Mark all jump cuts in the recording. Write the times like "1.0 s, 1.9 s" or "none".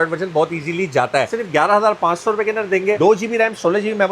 1.3 s